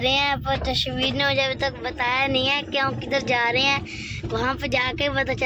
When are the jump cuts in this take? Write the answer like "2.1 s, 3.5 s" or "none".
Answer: none